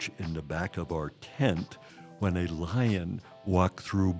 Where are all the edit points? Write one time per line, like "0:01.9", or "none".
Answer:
none